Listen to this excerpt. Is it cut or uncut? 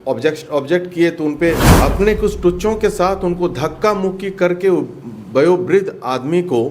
cut